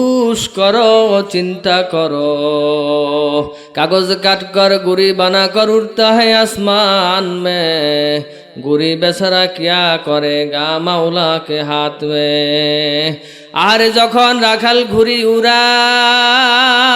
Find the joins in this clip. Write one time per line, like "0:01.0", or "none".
0:03.6